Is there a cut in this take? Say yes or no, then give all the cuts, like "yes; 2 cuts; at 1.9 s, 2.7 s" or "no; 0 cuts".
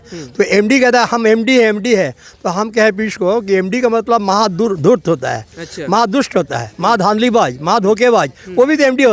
no; 0 cuts